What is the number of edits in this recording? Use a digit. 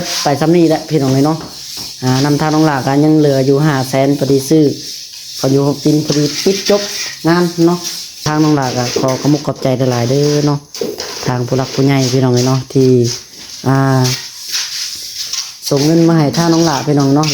1